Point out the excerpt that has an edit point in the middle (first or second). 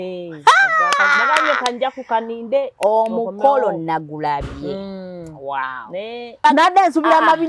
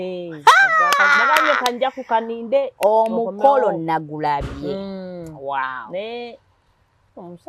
first